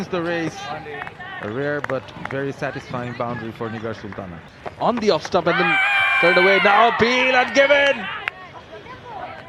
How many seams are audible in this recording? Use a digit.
1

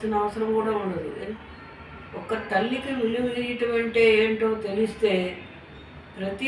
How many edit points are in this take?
1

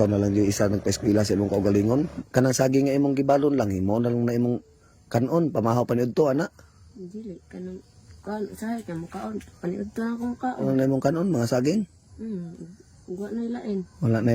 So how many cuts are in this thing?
2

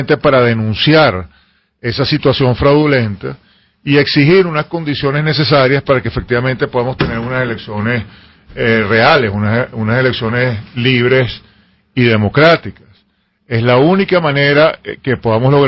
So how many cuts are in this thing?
1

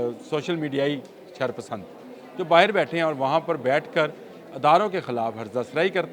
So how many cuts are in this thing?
0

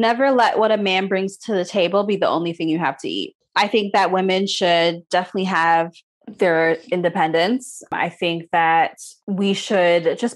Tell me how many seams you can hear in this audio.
0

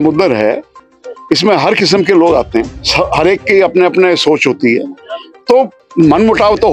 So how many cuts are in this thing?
2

